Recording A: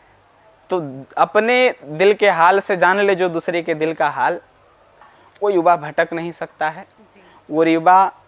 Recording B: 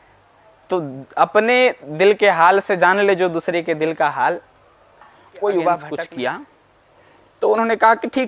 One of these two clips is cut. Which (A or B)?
B